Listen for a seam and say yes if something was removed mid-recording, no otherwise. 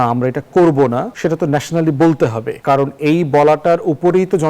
yes